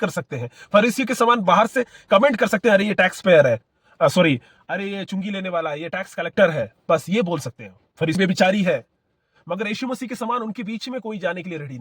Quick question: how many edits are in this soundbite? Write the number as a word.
one